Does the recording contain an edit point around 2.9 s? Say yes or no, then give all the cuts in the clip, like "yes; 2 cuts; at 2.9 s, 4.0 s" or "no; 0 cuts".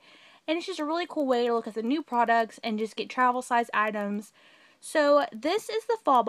yes; 1 cut; at 2.9 s